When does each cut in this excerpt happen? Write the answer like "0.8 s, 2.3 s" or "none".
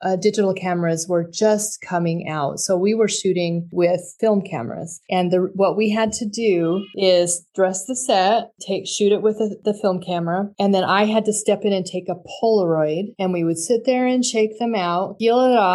none